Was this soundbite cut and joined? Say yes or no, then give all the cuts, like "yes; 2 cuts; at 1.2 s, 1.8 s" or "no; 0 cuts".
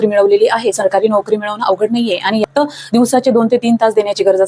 yes; 1 cut; at 2.4 s